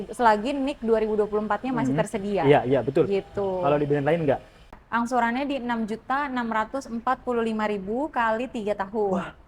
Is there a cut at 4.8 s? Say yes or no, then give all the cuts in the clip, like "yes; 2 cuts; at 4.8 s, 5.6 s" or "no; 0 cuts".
yes; 1 cut; at 4.8 s